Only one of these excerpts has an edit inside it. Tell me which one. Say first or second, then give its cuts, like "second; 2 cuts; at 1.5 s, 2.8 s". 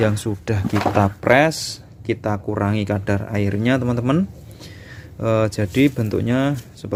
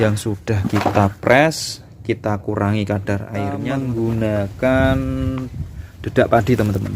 second; 1 cut; at 3.6 s